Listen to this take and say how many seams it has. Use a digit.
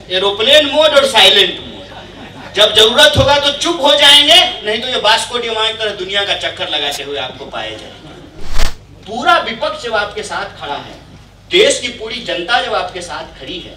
1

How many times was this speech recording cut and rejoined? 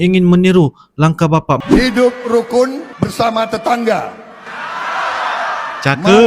1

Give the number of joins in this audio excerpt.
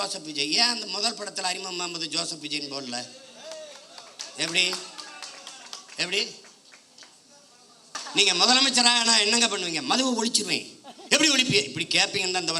1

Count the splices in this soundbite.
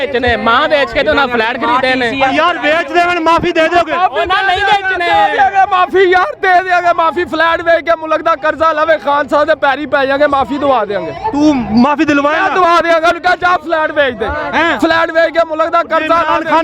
0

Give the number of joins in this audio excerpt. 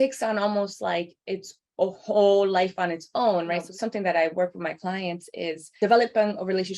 2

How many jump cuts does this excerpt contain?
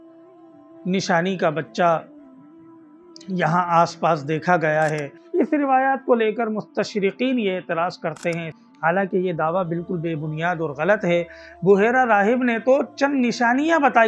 2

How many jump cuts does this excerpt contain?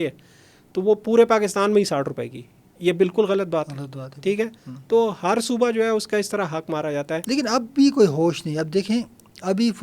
1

